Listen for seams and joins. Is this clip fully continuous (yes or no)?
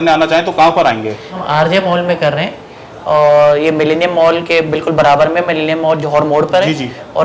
yes